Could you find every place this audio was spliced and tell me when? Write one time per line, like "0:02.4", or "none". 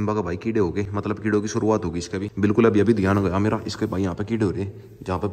none

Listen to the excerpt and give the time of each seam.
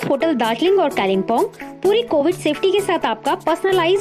none

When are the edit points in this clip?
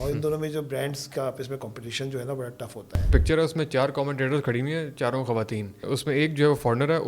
0:03.1
0:05.9

